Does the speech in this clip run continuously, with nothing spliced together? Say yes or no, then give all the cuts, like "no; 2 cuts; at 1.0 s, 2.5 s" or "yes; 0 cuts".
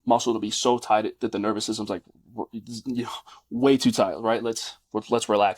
yes; 0 cuts